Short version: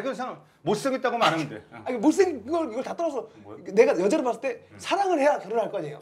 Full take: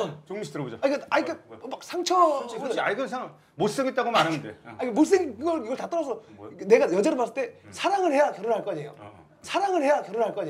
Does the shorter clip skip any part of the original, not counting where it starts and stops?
no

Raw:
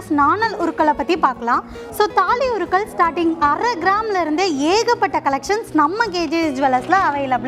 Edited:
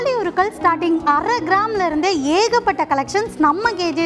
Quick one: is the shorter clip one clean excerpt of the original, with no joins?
yes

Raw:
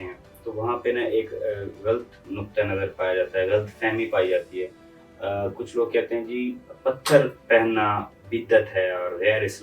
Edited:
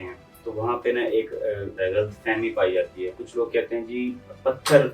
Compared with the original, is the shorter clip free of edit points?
no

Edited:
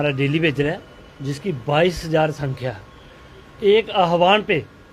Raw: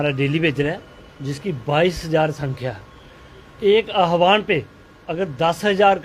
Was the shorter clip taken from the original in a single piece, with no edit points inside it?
yes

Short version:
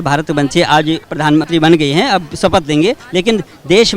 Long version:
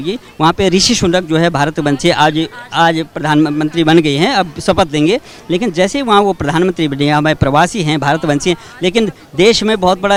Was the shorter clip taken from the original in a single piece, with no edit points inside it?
no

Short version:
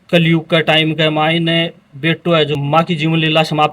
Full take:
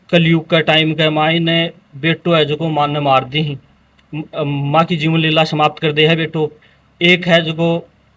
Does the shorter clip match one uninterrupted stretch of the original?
no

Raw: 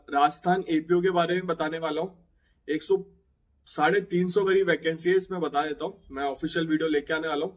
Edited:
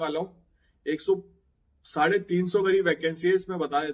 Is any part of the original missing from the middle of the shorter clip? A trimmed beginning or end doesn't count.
no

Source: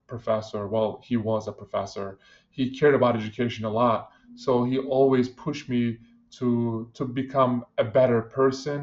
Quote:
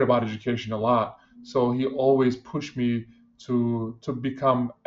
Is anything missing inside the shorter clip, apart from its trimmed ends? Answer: no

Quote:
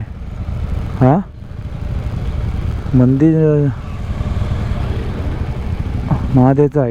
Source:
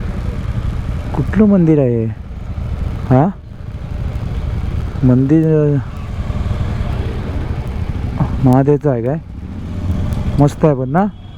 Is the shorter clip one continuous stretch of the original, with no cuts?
yes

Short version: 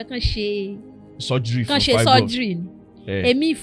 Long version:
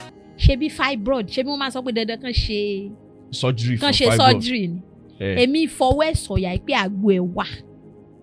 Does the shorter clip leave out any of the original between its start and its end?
no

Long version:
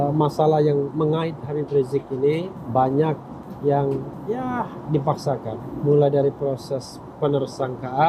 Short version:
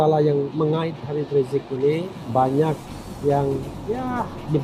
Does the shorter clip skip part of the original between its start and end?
no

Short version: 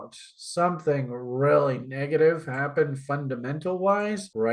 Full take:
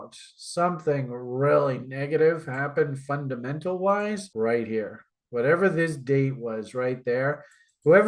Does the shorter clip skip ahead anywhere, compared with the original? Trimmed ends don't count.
no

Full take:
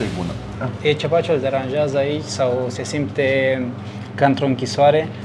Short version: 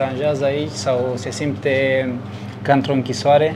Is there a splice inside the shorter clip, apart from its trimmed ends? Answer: no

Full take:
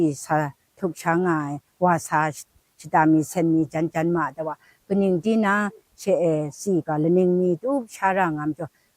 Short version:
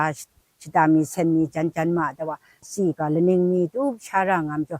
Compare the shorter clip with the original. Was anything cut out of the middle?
yes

